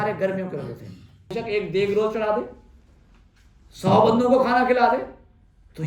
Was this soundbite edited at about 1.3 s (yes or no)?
yes